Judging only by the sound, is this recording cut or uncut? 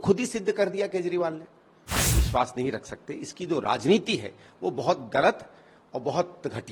cut